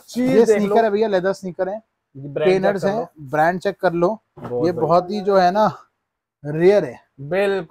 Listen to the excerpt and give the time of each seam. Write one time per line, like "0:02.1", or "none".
none